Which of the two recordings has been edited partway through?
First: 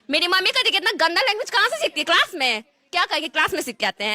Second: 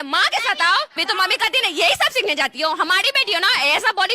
second; 1 cut; at 1.0 s

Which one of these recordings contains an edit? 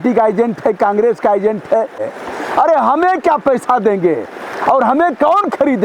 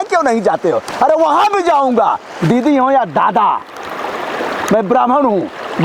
first; 1 cut; at 2.1 s

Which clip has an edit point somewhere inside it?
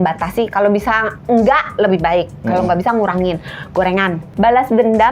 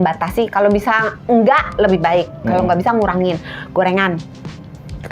first; 1 cut; at 4.2 s

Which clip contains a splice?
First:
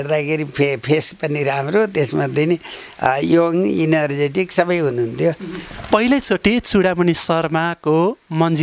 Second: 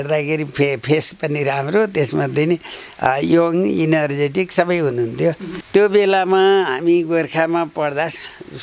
second; 1 cut; at 5.5 s

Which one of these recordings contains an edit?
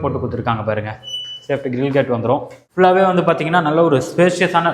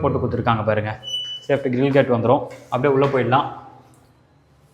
first; 1 cut; at 2.6 s

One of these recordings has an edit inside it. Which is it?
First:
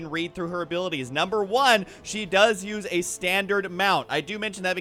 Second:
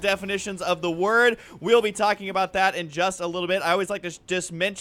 first; 1 cut; at 1.9 s

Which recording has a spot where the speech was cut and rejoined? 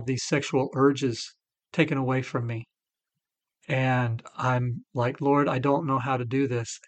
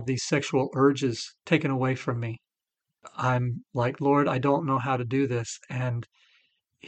second; 2 cuts; at 1.3 s, 3.0 s

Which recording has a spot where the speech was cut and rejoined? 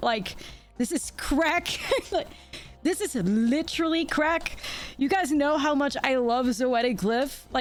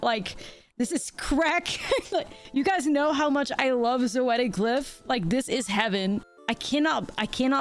second; 2 cuts; at 2.4 s, 6.3 s

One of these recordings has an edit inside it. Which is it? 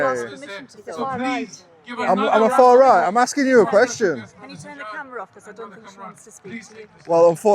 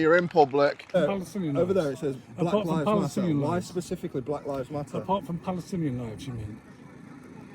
second; 1 cut; at 1.0 s

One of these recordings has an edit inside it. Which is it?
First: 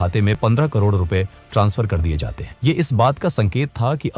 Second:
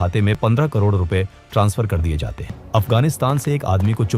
second; 1 cut; at 2.6 s

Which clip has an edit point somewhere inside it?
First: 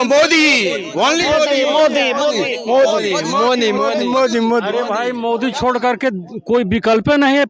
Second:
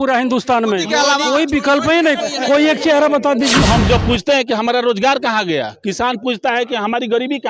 second; 1 cut; at 3.6 s

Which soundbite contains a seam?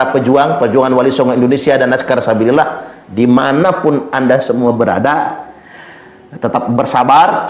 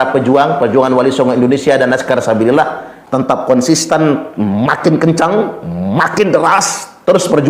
second; 1 cut; at 2.9 s

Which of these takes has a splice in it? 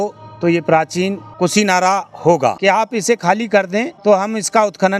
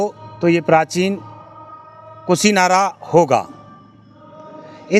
first; 3 cuts; at 1.2 s, 2.6 s, 3.9 s

